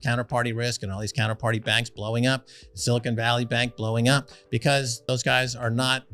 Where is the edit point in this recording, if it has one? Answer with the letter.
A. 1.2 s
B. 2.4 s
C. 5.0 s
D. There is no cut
C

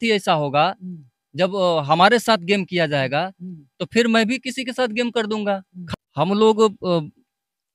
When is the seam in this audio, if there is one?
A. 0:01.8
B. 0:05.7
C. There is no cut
B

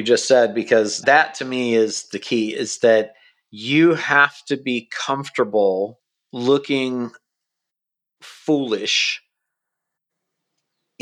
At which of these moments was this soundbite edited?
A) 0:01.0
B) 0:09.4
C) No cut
A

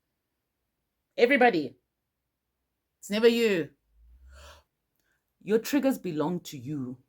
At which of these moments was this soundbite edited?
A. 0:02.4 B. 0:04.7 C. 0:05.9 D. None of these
B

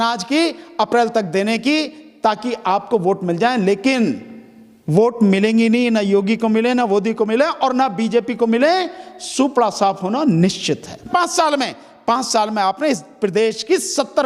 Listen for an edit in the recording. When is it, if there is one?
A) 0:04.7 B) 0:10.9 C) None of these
B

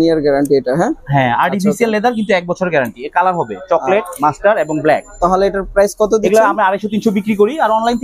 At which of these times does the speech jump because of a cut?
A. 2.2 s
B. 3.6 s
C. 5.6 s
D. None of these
D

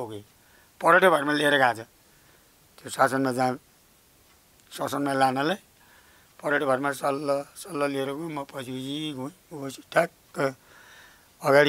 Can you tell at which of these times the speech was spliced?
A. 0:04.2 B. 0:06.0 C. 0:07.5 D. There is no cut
D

